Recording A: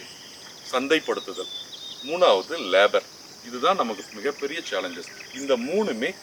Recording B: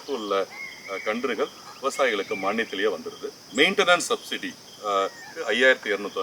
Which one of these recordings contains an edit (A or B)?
B